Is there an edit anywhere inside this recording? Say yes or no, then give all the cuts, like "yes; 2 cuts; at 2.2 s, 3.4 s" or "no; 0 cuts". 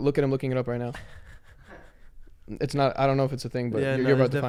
no; 0 cuts